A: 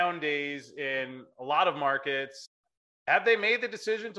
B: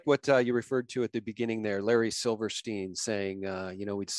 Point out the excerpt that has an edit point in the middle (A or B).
A